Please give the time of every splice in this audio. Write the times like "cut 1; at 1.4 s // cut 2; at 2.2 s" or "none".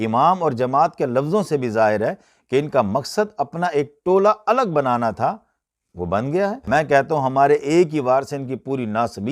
cut 1; at 6.6 s